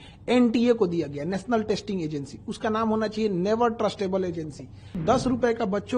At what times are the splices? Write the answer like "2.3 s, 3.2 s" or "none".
5.0 s